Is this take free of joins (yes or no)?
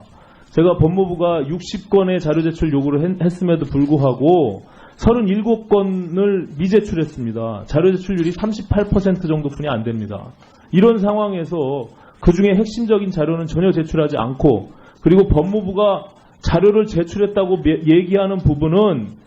no